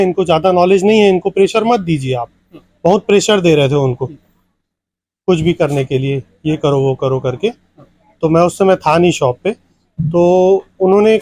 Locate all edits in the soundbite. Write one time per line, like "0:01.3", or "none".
none

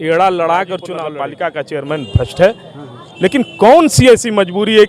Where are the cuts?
0:01.0

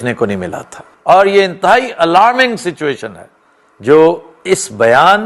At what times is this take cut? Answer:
none

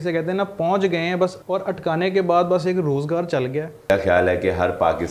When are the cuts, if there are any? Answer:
0:01.4
0:03.9

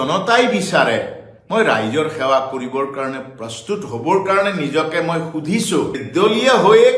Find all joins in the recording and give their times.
0:06.0

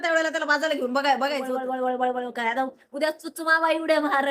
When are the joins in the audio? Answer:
0:01.6

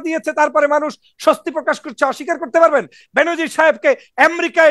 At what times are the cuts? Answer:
0:03.0

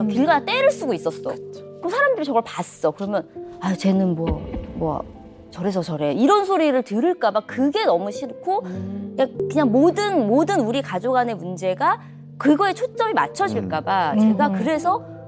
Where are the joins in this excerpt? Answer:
none

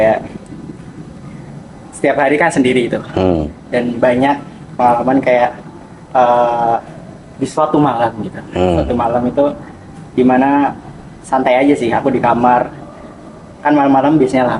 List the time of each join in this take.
none

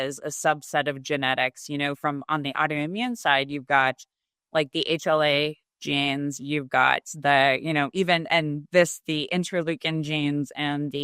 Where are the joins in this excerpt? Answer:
none

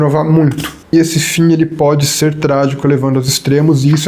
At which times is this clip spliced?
0:00.9

